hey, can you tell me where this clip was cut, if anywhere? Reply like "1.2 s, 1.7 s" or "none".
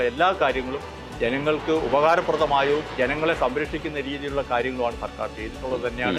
none